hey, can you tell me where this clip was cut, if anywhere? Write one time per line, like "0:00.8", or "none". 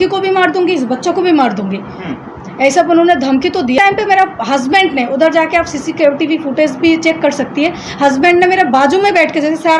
0:03.8